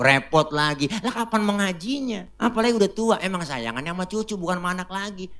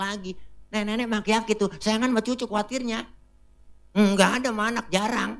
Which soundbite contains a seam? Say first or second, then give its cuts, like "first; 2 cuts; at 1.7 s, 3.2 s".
first; 1 cut; at 2.3 s